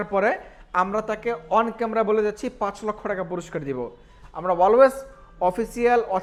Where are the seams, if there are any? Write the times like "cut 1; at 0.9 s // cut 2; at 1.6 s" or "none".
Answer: none